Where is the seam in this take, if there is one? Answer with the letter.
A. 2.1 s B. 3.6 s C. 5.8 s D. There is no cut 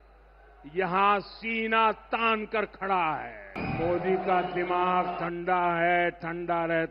B